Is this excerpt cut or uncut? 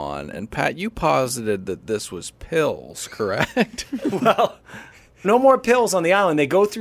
cut